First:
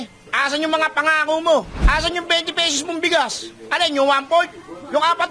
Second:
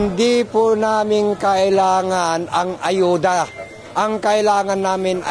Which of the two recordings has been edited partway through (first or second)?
first